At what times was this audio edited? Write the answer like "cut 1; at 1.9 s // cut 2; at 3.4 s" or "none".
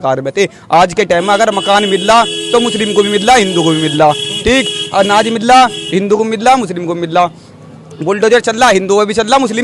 none